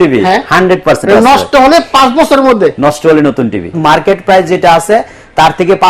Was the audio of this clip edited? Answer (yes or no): yes